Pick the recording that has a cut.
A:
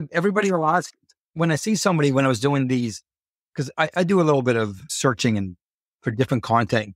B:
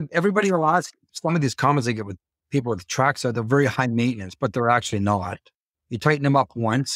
B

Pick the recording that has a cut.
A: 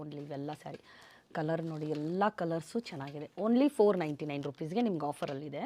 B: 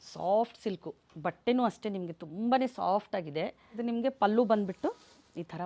B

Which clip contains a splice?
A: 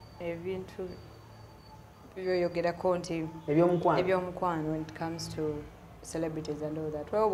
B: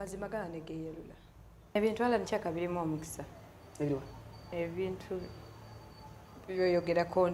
B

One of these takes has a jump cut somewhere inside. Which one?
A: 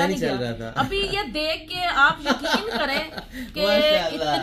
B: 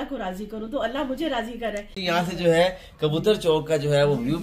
B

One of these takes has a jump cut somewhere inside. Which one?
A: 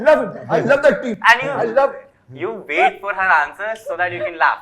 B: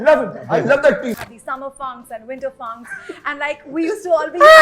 B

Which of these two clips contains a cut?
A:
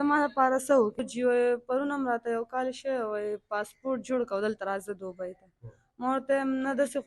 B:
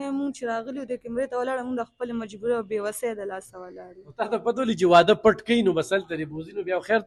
A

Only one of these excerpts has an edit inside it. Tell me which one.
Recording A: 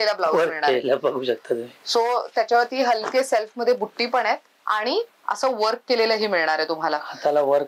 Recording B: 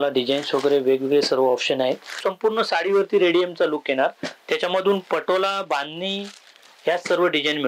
B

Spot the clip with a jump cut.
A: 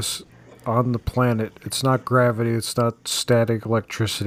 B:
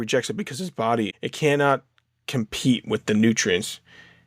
B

